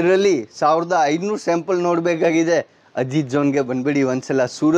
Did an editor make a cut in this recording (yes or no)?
no